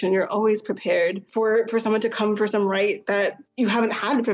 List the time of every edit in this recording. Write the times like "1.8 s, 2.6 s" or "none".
1.2 s, 3.4 s